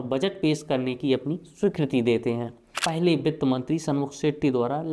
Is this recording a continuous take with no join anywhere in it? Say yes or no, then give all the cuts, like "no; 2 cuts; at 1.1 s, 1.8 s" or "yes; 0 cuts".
no; 1 cut; at 2.7 s